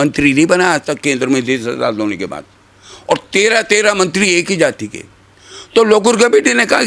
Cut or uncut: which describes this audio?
uncut